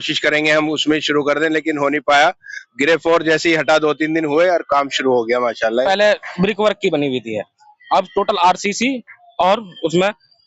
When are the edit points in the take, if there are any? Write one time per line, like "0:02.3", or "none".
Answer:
0:05.8